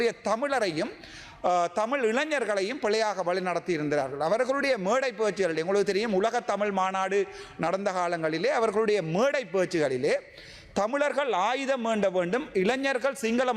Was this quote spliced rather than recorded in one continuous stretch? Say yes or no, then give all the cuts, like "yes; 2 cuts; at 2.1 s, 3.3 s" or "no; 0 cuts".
no; 0 cuts